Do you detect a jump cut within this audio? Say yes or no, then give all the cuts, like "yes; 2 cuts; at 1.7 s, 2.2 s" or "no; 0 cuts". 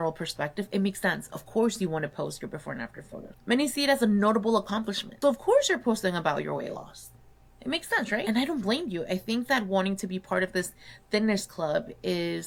no; 0 cuts